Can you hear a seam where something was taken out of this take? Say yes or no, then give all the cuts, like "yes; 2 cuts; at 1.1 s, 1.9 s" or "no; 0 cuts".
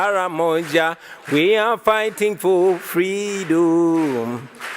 no; 0 cuts